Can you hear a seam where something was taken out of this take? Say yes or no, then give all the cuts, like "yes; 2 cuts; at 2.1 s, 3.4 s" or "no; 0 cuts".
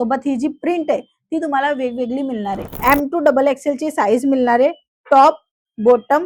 yes; 1 cut; at 2.8 s